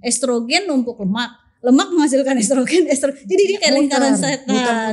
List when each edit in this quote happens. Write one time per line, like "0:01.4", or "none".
none